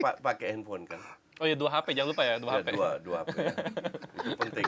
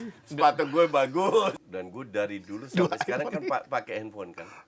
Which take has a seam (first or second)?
second